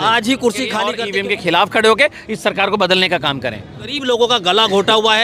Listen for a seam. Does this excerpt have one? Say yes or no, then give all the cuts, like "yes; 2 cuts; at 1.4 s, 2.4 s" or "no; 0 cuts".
yes; 2 cuts; at 0.9 s, 4.0 s